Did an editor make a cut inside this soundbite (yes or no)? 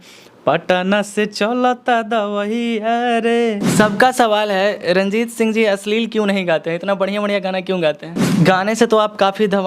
yes